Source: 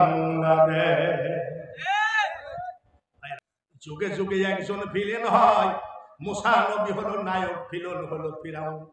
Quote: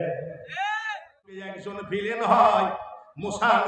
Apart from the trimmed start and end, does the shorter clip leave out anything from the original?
yes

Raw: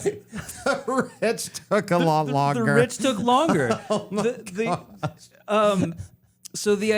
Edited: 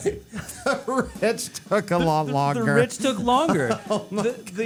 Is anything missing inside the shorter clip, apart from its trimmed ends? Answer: no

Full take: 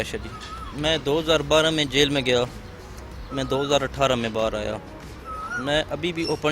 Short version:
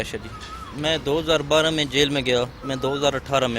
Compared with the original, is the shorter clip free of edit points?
no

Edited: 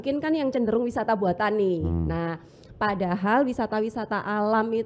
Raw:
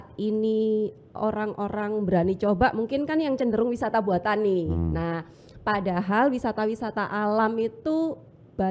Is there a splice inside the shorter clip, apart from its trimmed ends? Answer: no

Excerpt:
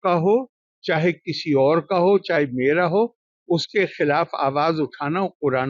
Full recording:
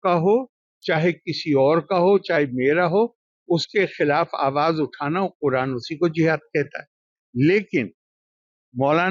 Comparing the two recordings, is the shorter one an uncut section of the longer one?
yes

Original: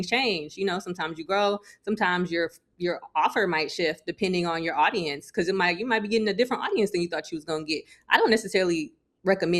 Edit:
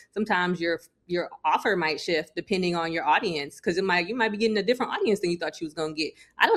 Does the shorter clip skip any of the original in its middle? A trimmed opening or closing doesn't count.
no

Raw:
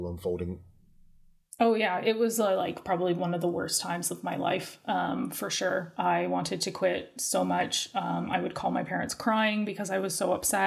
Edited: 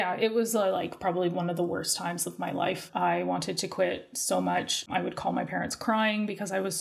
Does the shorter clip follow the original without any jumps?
no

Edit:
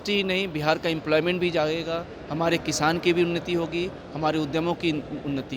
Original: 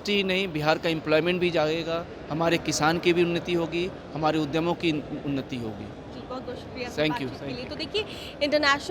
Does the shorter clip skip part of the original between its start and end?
no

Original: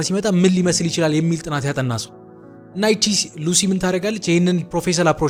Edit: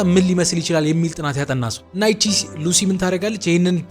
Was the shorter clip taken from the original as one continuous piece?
no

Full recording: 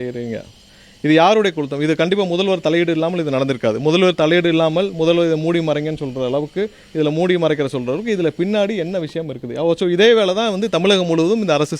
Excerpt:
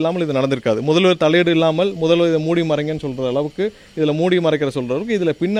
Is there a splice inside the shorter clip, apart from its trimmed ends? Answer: no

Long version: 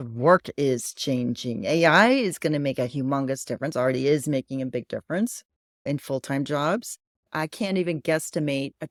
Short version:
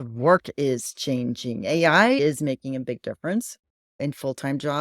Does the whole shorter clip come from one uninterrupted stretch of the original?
no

